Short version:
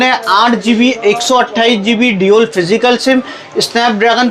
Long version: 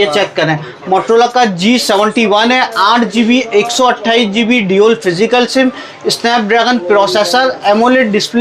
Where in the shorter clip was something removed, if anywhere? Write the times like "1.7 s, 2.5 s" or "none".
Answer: none